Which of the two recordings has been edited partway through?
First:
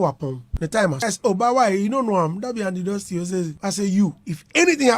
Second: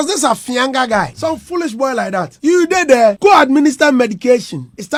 first; 1 cut; at 1.1 s

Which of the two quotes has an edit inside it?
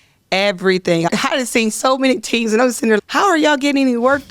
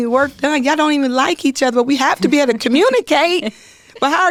first; 2 cuts; at 1.1 s, 3.0 s

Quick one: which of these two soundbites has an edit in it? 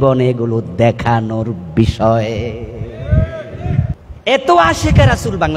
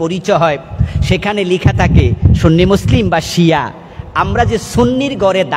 first; 1 cut; at 4.1 s

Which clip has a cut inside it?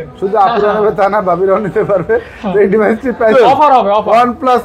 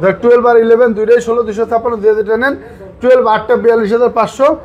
first; 1 cut; at 3.3 s

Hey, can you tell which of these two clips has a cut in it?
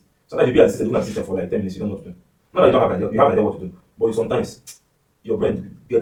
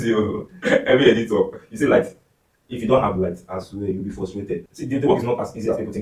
second; 1 cut; at 4.7 s

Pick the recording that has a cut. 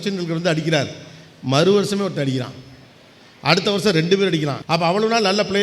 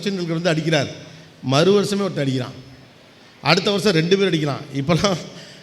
first; 1 cut; at 4.6 s

